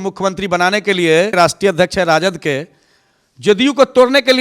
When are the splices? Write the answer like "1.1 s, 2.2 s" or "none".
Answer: 1.3 s